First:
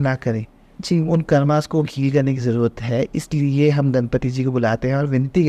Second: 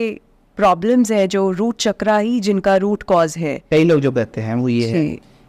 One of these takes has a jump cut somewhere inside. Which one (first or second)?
second